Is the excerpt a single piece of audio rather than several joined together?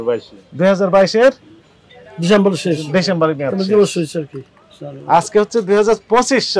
yes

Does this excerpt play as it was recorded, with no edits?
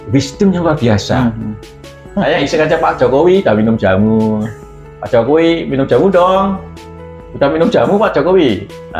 no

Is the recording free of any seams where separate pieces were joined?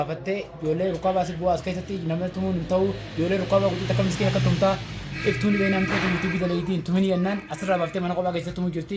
yes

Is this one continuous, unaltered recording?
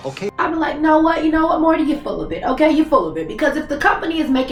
yes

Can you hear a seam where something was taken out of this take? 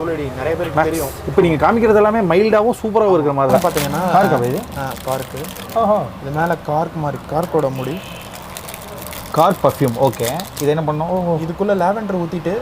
yes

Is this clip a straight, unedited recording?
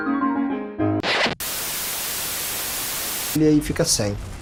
yes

